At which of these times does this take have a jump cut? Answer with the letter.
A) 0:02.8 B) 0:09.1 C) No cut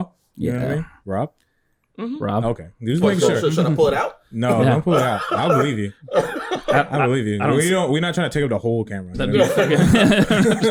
C